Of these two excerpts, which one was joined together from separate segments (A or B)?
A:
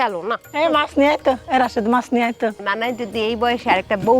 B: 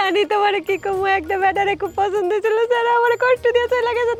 A